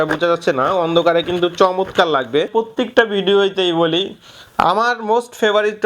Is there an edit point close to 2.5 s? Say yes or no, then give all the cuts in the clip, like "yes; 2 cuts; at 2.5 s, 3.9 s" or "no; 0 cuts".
yes; 1 cut; at 2.5 s